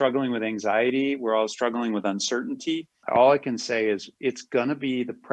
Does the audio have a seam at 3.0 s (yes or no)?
yes